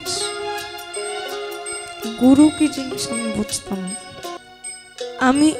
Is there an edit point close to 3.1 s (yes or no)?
no